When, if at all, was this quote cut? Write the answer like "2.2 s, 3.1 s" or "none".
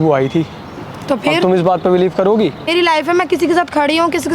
2.7 s